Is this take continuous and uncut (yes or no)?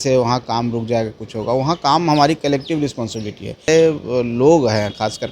no